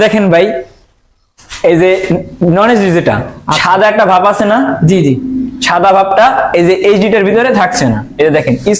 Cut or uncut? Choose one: uncut